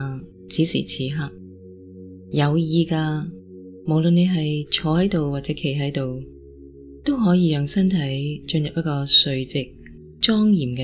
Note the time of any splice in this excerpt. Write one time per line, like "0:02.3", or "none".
none